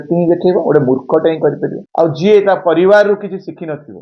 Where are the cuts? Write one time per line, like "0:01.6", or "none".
0:02.2